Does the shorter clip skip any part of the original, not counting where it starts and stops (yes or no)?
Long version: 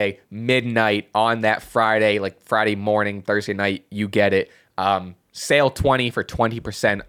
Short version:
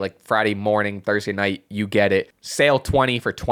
yes